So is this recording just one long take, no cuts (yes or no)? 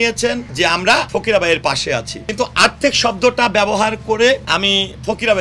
no